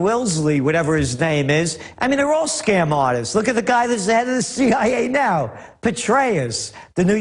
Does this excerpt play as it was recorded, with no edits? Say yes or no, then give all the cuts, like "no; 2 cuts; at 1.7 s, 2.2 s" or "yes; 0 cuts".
yes; 0 cuts